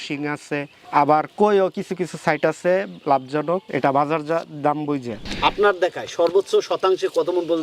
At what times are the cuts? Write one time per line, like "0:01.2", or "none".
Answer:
0:05.2